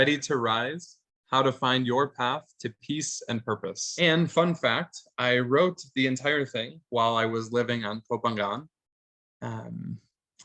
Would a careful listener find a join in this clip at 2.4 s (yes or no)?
no